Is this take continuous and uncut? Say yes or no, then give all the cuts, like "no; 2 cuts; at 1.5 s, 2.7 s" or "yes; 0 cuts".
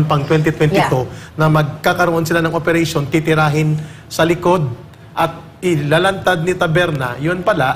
yes; 0 cuts